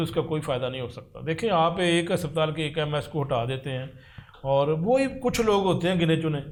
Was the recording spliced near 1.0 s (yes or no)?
no